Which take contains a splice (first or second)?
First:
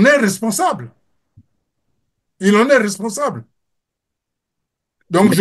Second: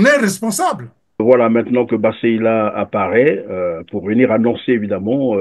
second